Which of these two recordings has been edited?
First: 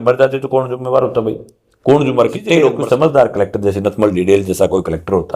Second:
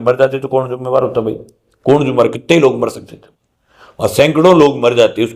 first; 1 cut; at 2.8 s

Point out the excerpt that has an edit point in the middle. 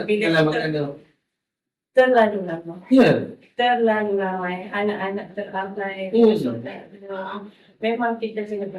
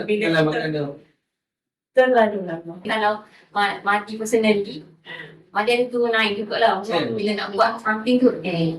second; 1 cut; at 2.8 s

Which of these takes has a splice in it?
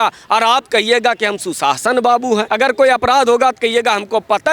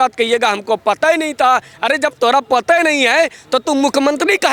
first; 1 cut; at 2.5 s

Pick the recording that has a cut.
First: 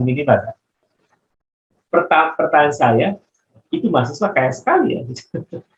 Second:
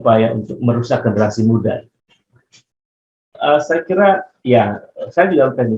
second; 1 cut; at 3.2 s

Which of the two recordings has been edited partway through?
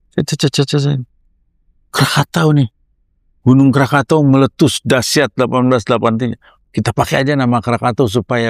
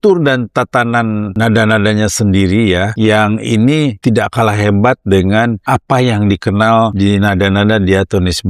second; 5 cuts; at 1.3 s, 2.9 s, 4.0 s, 5.6 s, 6.9 s

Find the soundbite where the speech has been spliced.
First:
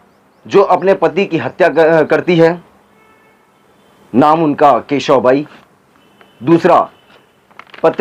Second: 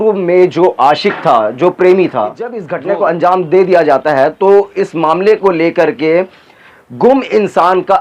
second; 1 cut; at 2.7 s

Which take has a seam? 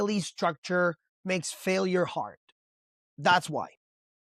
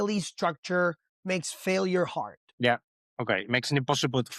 second; 1 cut; at 2.4 s

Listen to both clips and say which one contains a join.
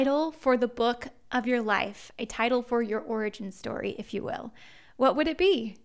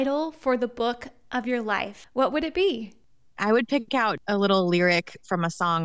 second; 3 cuts; at 2.0 s, 3.0 s, 4.2 s

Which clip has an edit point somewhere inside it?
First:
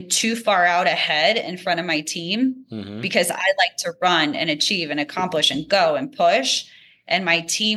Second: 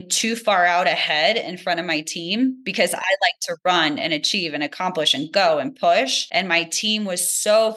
second; 2 cuts; at 2.6 s, 6.2 s

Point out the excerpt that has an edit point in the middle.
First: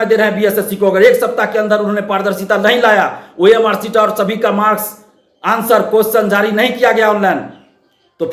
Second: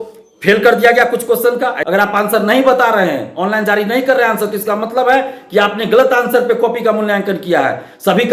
second; 1 cut; at 1.8 s

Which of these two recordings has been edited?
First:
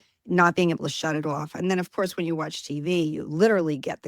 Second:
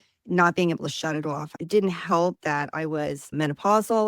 second; 1 cut; at 1.5 s

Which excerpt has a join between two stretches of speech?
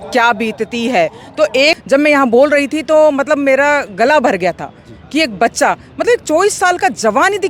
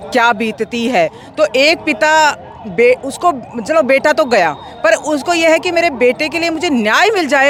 first; 1 cut; at 1.8 s

